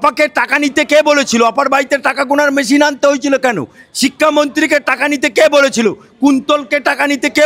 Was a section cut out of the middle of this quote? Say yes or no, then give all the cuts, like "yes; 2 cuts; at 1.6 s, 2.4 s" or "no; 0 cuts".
no; 0 cuts